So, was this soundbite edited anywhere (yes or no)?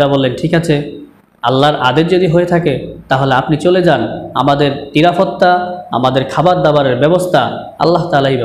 no